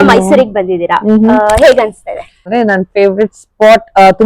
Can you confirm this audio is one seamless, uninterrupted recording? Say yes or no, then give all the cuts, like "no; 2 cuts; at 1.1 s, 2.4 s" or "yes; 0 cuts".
no; 1 cut; at 2.5 s